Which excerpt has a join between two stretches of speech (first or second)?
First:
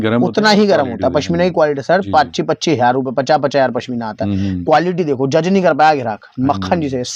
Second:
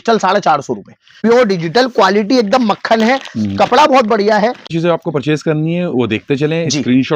second